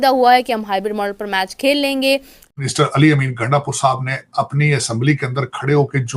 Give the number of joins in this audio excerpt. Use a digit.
1